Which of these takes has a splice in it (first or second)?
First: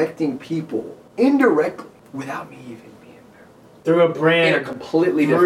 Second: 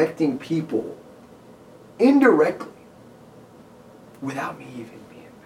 first